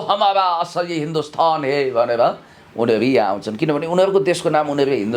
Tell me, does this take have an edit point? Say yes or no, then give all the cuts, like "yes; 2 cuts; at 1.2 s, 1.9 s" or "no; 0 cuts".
no; 0 cuts